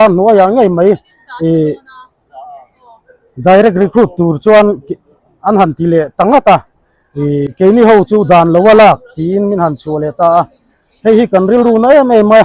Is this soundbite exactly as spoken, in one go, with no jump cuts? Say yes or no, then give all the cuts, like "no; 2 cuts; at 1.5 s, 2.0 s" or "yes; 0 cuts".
yes; 0 cuts